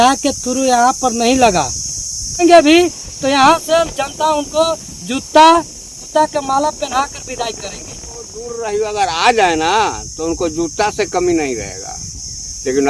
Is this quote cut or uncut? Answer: cut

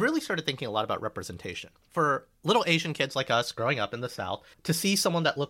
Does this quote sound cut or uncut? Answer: cut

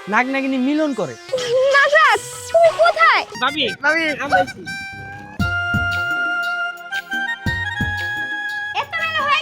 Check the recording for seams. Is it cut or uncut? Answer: cut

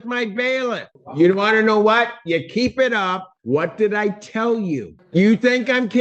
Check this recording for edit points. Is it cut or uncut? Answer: cut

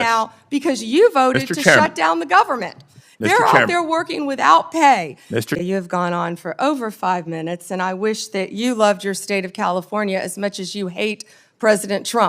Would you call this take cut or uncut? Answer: cut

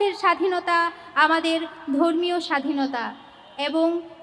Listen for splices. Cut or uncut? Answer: uncut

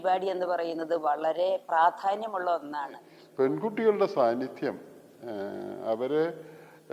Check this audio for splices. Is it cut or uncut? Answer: cut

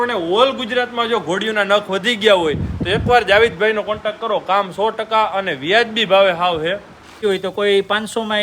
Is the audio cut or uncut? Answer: cut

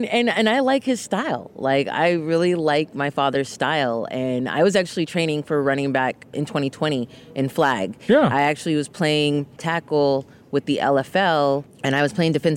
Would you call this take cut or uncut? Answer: cut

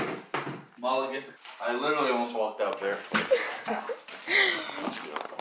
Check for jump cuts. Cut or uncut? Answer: uncut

